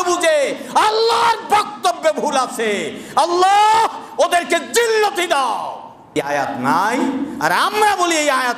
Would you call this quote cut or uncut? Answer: cut